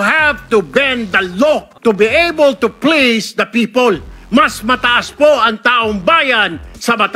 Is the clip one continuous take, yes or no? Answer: no